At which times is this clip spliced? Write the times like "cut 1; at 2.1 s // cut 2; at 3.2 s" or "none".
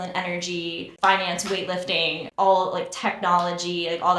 cut 1; at 0.9 s // cut 2; at 2.2 s